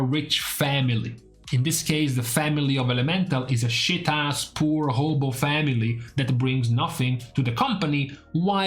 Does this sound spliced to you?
no; 0 cuts

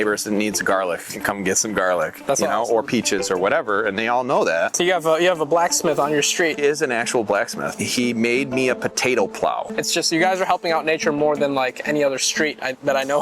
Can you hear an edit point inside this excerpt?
yes; 4 cuts; at 4.7 s, 6.6 s, 7.7 s, 9.8 s

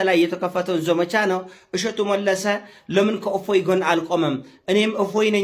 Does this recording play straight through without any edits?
yes; 0 cuts

